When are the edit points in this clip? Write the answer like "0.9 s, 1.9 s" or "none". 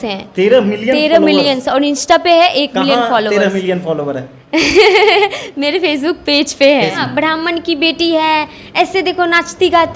7.0 s